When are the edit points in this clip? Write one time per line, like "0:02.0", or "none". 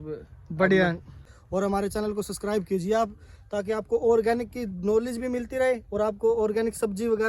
0:01.3